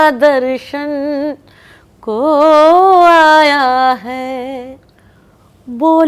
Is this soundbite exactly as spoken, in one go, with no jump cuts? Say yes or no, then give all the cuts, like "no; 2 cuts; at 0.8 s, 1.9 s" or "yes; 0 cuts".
yes; 0 cuts